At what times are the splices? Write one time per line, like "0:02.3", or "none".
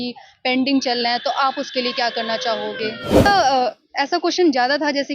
0:03.3